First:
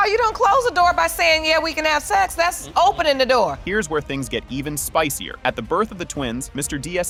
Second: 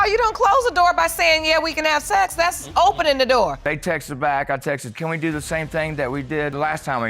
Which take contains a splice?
second; 1 cut; at 3.6 s

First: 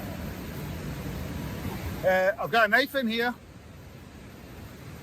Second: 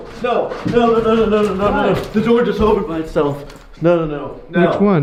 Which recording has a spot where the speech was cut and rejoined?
first; 1 cut; at 1.6 s

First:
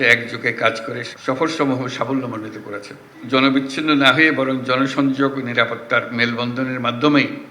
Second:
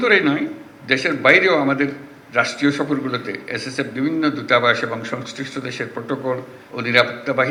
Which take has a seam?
first; 1 cut; at 3.2 s

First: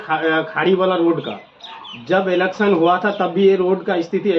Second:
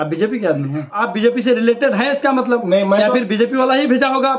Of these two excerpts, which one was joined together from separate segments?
second; 1 cut; at 0.9 s

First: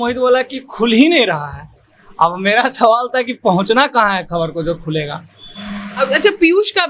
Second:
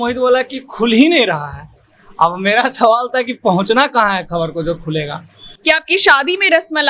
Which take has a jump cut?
second; 1 cut; at 5.4 s

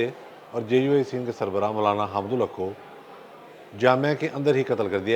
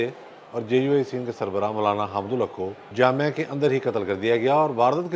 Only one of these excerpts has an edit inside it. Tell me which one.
second; 1 cut; at 2.8 s

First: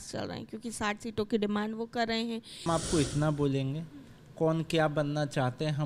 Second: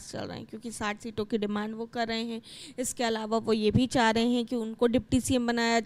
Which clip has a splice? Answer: first; 1 cut; at 2.6 s

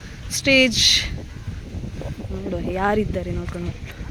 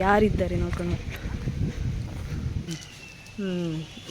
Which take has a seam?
second; 1 cut; at 2.6 s

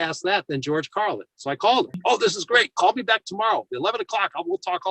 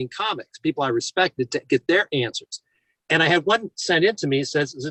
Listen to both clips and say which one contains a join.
first; 1 cut; at 1.9 s

